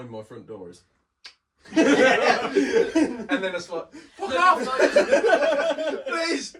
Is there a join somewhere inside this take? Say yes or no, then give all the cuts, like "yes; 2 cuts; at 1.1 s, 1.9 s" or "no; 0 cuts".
no; 0 cuts